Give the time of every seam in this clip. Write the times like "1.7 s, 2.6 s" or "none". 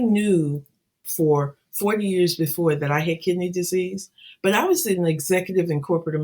1.0 s